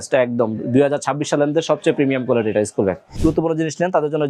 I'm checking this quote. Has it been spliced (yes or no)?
yes